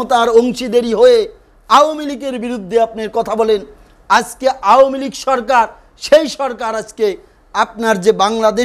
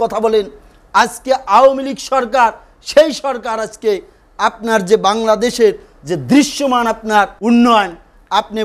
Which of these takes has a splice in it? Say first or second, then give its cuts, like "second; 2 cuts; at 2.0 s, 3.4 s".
second; 1 cut; at 7.3 s